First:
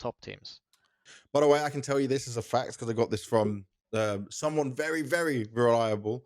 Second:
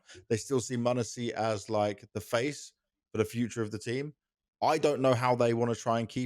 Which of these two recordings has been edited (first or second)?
first